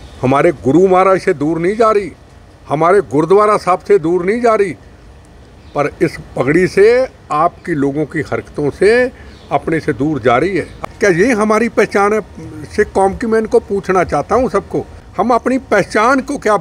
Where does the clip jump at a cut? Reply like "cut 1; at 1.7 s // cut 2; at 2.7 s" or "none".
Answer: cut 1; at 10.7 s // cut 2; at 15.0 s